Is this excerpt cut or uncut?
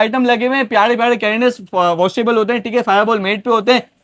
uncut